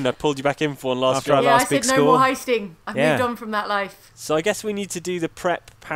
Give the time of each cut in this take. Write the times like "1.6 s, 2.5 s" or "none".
none